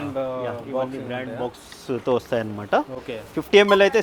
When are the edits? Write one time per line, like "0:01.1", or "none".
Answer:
none